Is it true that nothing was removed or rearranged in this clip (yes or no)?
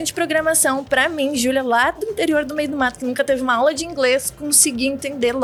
yes